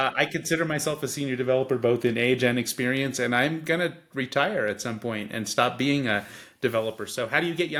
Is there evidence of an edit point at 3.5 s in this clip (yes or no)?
no